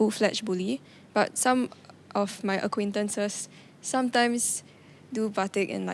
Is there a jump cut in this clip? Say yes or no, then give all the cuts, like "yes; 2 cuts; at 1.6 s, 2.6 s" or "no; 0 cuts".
no; 0 cuts